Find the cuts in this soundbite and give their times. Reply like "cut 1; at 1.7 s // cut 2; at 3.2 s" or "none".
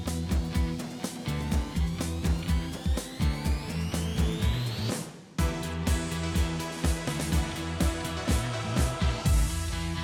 none